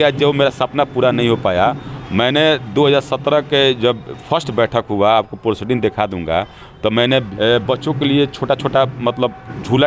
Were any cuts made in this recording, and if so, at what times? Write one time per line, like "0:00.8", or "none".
0:01.9
0:07.3